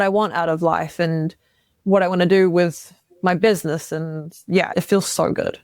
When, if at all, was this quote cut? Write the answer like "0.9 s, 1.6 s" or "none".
4.7 s